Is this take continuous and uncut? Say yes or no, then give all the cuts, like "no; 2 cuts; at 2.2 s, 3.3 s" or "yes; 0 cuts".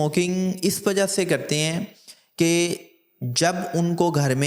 yes; 0 cuts